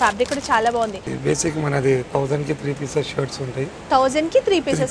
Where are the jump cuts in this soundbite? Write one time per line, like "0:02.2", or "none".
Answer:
0:01.0